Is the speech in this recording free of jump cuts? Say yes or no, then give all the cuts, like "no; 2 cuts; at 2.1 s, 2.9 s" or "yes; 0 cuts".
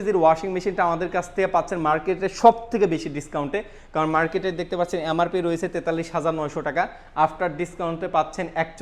yes; 0 cuts